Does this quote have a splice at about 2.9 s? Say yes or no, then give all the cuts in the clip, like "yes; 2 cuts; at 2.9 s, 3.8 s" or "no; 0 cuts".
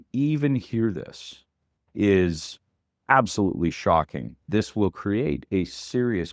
no; 1 cut; at 4.4 s